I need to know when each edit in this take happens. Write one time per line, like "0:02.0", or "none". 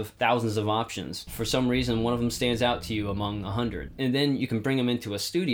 none